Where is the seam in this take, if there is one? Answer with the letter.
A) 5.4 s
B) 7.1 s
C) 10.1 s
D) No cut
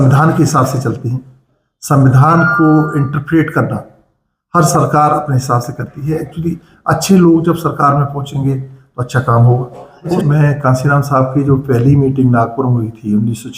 C